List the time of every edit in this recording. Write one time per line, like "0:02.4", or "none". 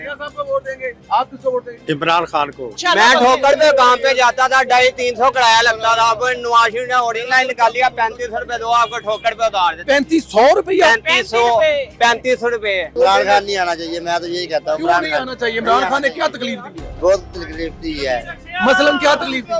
0:00.9
0:02.7
0:12.9